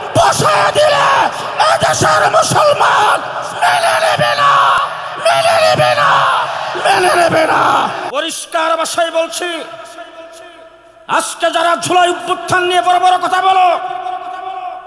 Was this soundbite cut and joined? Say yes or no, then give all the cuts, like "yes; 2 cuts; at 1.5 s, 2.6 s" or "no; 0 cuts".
yes; 1 cut; at 8.0 s